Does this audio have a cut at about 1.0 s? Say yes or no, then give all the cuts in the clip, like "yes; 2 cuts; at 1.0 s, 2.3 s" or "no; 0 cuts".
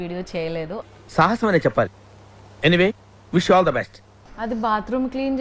no; 1 cut; at 4.1 s